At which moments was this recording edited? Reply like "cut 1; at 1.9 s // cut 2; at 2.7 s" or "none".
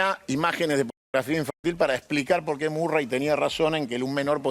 none

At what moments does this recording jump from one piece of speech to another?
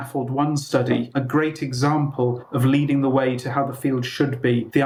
none

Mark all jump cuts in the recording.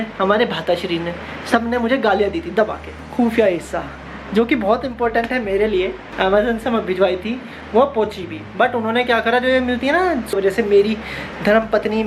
cut 1; at 3.0 s // cut 2; at 5.9 s // cut 3; at 10.3 s

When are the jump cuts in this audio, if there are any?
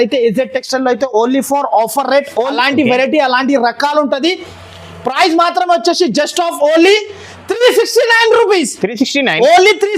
cut 1; at 2.5 s

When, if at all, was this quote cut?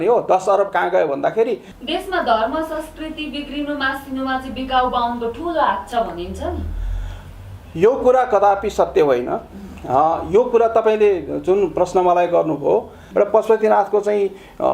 cut 1; at 1.7 s // cut 2; at 13.0 s

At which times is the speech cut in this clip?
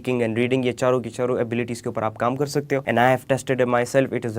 cut 1; at 2.8 s

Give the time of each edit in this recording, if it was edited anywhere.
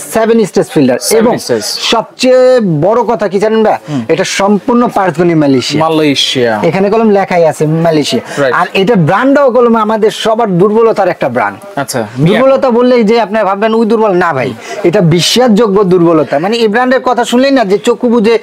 none

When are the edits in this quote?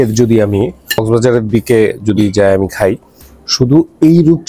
cut 1; at 1.0 s

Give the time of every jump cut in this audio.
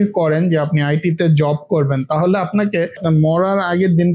cut 1; at 3.0 s

